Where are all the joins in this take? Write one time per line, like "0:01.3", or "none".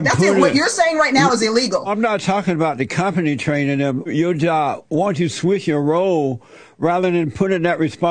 0:01.9
0:04.1